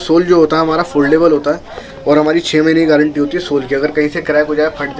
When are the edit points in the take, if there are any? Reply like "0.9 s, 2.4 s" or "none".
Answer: none